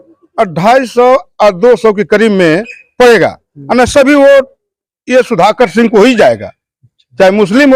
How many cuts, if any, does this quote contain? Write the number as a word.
zero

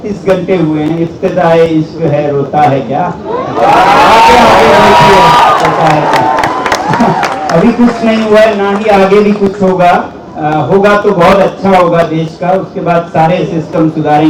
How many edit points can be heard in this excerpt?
zero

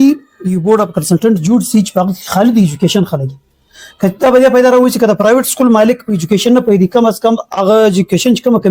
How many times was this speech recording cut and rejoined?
zero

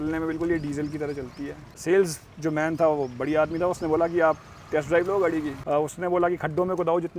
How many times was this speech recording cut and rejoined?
two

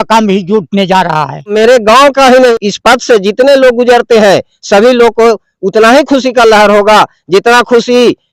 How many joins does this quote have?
two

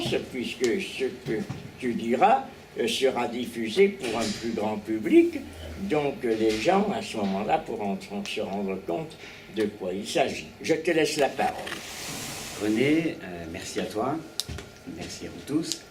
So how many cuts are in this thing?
zero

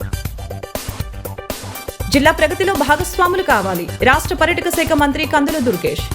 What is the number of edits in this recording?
one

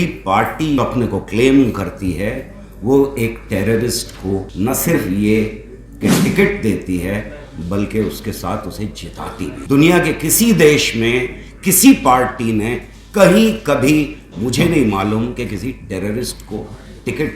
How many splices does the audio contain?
three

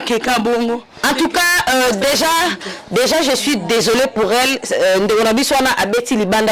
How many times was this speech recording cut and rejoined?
one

